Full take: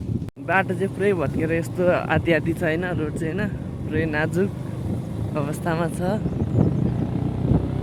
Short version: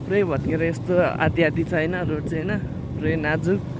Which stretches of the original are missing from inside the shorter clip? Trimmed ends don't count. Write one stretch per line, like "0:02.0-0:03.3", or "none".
none